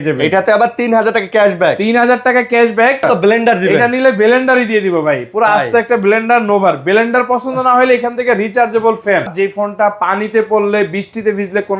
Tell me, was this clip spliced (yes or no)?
yes